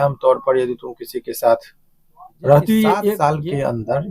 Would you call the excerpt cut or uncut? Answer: cut